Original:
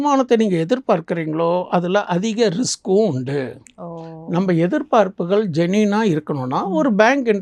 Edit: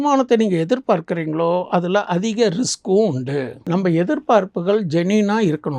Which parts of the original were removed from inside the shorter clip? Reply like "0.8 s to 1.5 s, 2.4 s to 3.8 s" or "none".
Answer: 3.6 s to 4.2 s